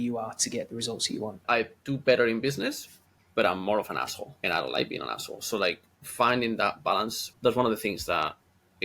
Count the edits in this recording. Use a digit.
3